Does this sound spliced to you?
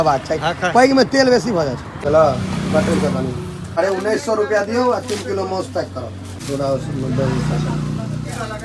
yes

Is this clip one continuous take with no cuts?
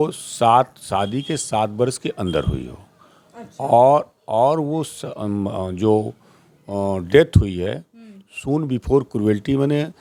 yes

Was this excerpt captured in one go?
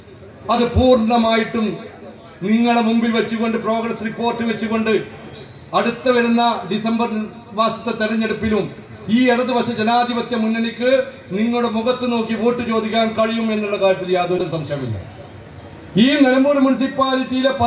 yes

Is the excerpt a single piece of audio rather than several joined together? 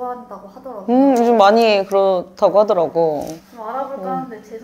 yes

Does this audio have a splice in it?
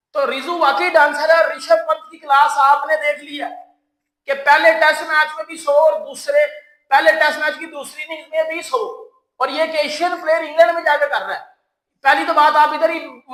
no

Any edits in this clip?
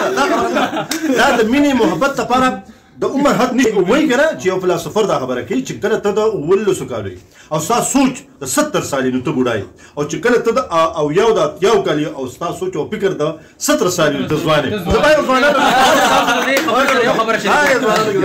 yes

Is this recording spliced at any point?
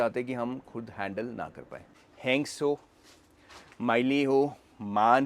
yes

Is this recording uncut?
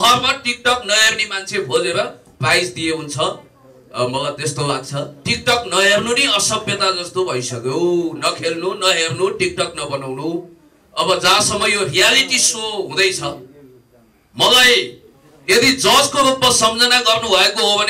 yes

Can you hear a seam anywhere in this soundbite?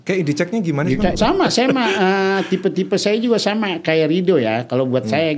yes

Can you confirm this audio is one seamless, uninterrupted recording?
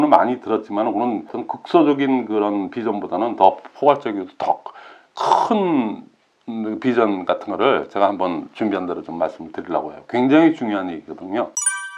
yes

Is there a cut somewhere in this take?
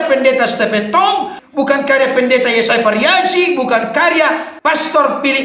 yes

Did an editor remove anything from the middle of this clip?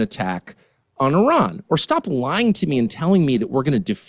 no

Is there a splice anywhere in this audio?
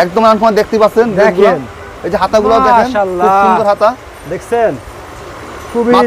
no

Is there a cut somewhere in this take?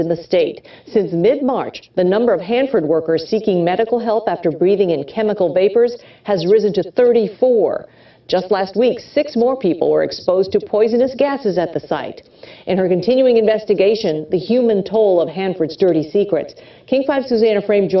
no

